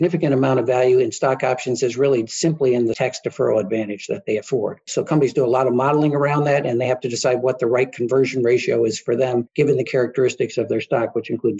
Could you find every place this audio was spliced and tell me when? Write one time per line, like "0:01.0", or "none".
0:03.0
0:04.8
0:09.5